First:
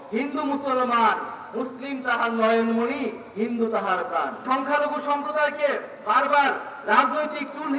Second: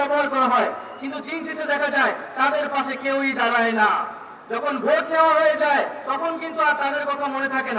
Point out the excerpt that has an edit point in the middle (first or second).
first